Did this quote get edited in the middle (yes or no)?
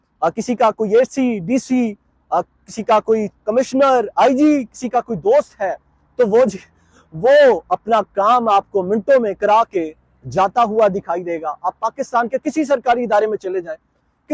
no